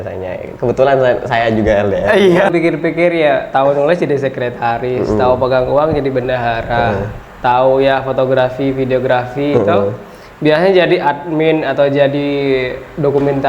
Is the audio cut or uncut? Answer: cut